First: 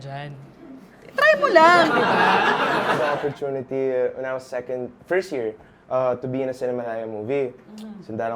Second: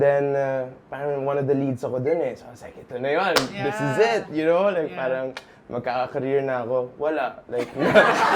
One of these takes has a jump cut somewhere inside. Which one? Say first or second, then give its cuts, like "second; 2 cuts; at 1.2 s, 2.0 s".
first; 1 cut; at 2.9 s